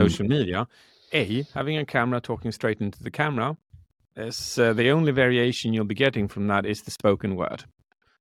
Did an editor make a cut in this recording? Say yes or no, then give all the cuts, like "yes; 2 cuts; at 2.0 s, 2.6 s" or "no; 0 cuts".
no; 0 cuts